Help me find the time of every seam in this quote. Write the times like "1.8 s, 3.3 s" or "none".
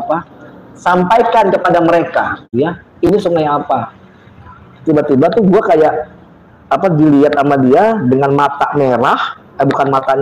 2.5 s